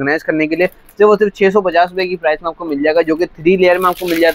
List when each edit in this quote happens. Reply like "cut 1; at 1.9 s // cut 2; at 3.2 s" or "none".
none